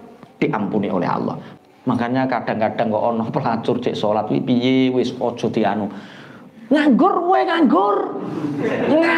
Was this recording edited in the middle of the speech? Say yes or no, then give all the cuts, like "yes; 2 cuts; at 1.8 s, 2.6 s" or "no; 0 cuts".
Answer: yes; 1 cut; at 1.4 s